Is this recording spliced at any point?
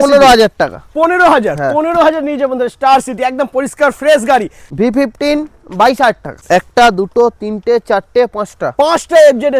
yes; 2 cuts; at 4.6 s, 6.4 s

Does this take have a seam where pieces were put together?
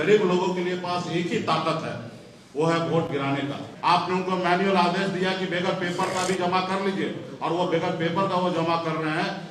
yes; 1 cut; at 3.7 s

